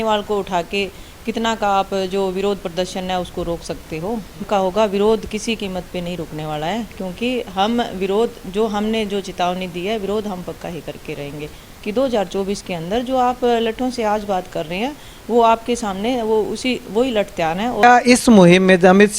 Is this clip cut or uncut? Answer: cut